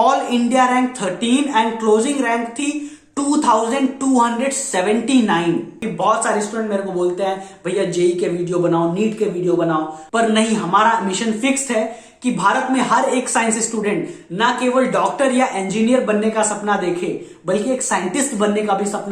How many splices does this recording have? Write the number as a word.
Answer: one